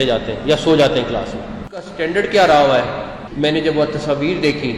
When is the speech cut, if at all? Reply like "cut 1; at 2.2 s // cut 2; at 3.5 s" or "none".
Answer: cut 1; at 1.8 s // cut 2; at 3.2 s